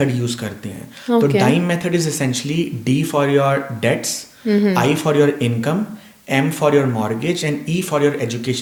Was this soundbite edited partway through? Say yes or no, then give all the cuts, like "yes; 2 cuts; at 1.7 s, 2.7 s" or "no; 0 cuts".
no; 0 cuts